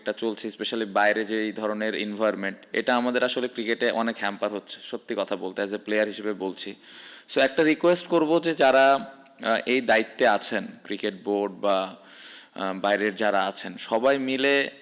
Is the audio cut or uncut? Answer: uncut